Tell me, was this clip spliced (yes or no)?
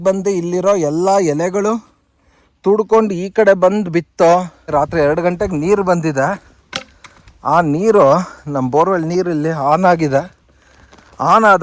yes